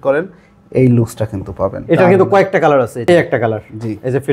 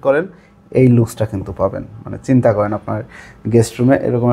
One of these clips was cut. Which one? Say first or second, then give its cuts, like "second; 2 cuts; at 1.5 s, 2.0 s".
first; 2 cuts; at 1.8 s, 3.0 s